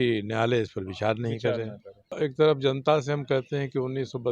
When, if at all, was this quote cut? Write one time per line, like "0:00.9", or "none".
0:02.1